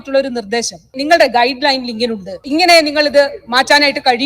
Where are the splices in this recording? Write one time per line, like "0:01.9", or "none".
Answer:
0:01.0
0:02.4